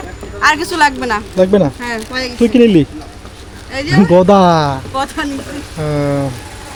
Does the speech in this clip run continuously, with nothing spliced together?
yes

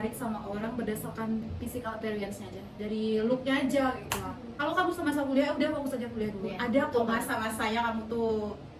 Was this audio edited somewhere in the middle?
no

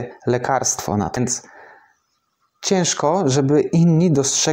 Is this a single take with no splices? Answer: no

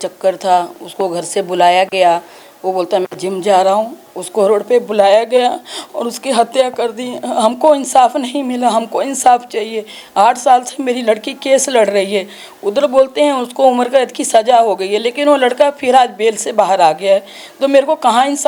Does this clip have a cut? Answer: no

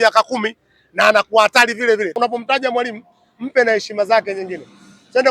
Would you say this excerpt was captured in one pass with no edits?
no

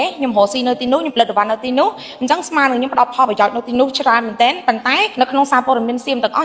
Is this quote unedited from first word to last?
no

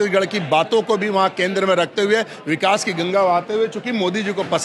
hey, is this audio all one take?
yes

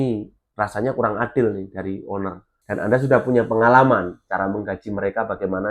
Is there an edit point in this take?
yes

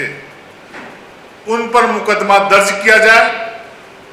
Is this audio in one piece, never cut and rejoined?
yes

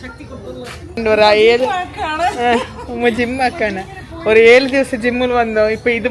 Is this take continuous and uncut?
yes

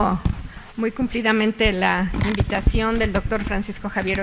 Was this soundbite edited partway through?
no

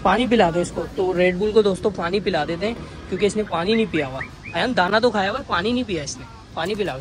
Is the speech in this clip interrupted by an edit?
no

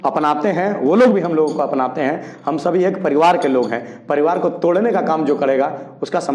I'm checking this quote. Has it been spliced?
no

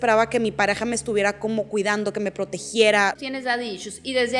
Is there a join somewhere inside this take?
yes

